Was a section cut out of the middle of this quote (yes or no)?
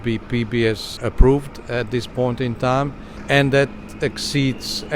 yes